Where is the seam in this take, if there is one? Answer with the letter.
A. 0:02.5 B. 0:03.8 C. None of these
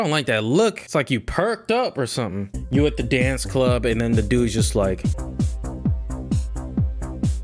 A